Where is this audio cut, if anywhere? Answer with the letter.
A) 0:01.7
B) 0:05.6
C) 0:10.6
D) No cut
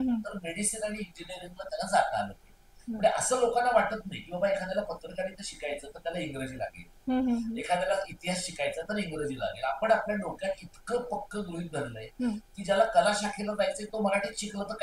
D